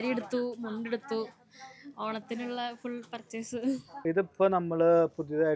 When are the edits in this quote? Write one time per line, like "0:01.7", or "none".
0:04.0